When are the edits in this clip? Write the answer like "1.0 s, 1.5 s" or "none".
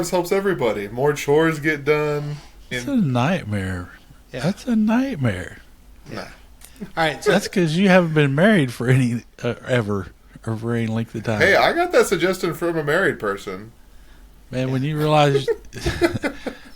2.8 s